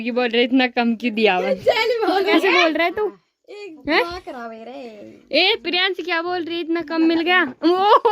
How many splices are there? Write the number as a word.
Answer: one